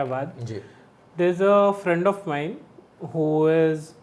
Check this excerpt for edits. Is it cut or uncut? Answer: uncut